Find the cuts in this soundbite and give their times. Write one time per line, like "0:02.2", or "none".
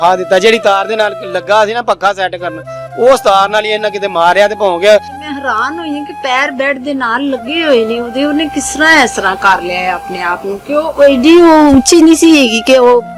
0:05.2